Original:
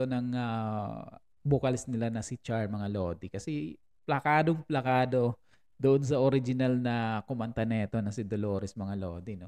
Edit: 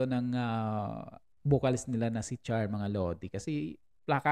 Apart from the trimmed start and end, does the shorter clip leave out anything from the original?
no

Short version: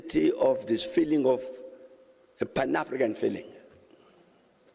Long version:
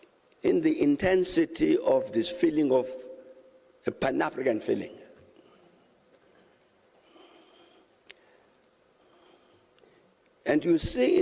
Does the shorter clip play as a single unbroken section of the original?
yes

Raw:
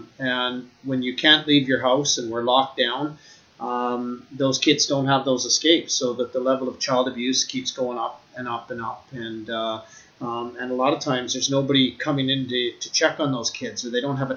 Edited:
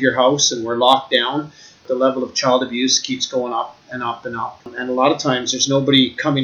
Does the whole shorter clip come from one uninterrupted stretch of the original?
no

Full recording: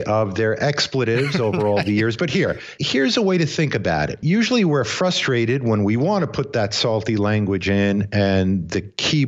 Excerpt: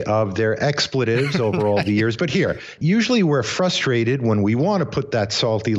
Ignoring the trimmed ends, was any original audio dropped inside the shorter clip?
yes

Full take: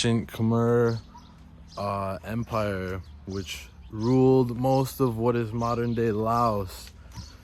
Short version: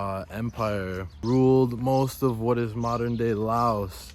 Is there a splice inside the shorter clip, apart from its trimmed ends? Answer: yes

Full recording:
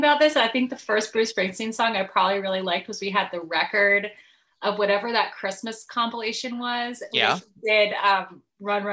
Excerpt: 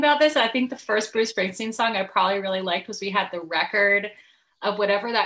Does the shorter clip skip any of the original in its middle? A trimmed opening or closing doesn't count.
no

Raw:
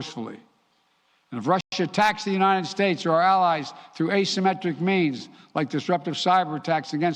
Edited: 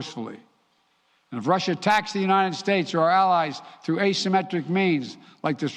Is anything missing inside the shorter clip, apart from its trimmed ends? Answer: yes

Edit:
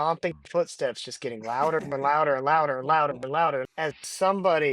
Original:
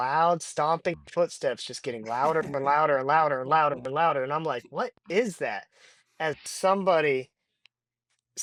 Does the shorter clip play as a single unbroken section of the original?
no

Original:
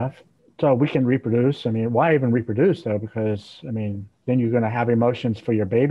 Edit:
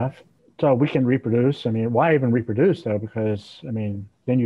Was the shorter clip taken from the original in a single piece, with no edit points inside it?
yes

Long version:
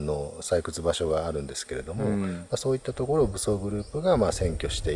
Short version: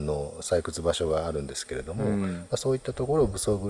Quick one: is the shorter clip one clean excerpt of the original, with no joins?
yes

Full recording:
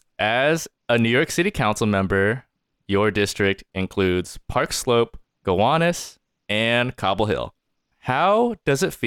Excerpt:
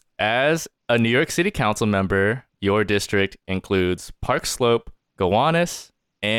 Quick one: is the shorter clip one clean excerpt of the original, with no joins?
no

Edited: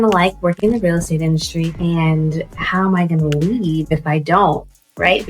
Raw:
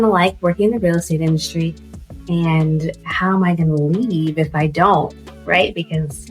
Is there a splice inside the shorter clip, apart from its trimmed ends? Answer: yes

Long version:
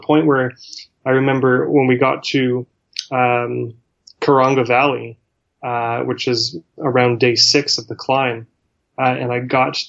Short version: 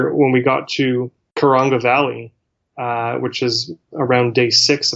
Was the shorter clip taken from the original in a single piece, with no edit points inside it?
no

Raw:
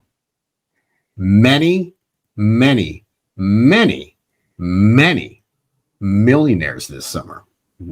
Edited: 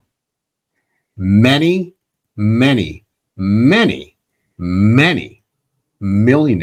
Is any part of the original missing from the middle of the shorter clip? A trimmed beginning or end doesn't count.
no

